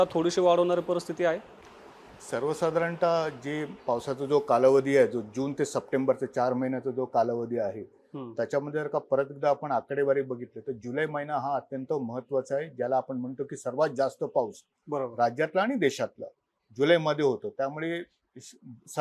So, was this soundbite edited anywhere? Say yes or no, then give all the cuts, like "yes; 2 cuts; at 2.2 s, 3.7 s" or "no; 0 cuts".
no; 0 cuts